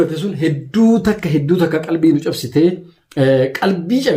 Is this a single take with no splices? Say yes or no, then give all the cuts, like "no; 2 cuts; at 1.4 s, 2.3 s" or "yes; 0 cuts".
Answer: yes; 0 cuts